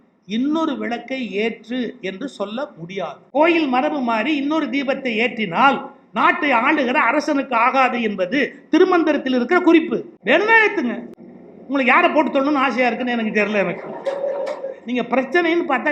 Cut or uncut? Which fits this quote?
cut